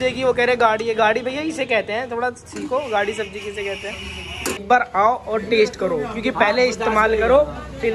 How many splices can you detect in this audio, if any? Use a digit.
1